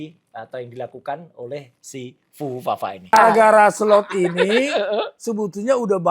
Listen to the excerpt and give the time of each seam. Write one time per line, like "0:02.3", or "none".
0:03.1